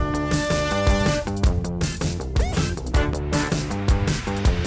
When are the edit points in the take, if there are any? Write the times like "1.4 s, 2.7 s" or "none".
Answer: 3.7 s